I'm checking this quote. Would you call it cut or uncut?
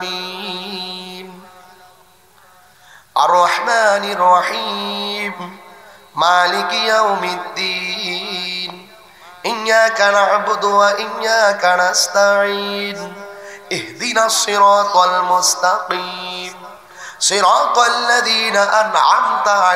uncut